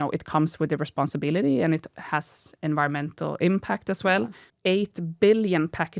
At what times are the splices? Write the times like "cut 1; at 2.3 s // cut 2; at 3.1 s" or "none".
cut 1; at 4.5 s